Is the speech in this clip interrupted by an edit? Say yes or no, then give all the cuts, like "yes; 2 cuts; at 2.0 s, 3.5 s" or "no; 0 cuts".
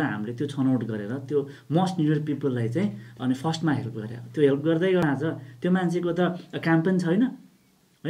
yes; 1 cut; at 5.0 s